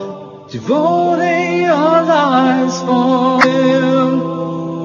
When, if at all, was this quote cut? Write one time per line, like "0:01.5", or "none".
0:03.4